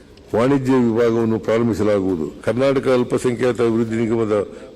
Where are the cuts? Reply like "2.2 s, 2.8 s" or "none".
2.3 s